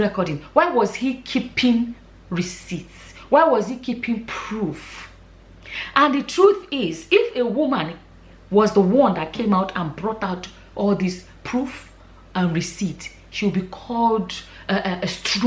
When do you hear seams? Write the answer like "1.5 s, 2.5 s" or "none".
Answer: none